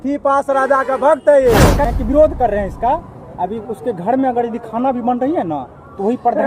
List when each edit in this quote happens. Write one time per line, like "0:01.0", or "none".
0:01.8